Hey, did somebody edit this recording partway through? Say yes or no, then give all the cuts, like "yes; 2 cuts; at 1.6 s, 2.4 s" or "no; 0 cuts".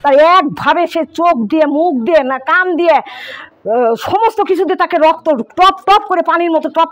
no; 0 cuts